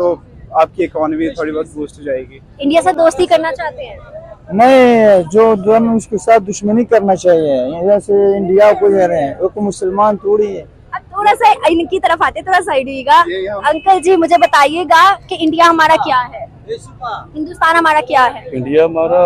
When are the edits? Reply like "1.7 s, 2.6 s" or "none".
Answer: none